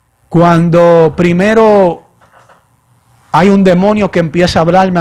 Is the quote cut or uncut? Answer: uncut